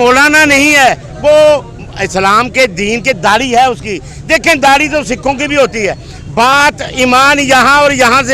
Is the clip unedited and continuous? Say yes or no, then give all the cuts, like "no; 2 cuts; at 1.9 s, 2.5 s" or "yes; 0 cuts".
yes; 0 cuts